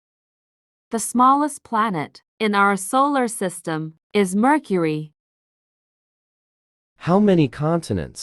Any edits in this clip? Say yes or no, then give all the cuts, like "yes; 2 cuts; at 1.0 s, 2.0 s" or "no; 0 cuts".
no; 0 cuts